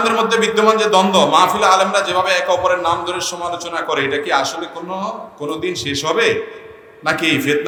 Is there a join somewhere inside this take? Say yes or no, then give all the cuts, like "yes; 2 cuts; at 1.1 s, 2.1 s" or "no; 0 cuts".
no; 0 cuts